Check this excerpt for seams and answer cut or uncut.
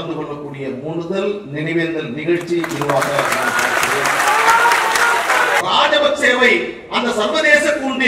cut